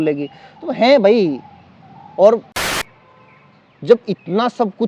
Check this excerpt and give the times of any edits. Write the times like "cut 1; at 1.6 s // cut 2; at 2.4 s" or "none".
cut 1; at 2.6 s